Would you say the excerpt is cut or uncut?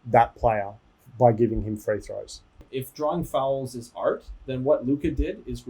cut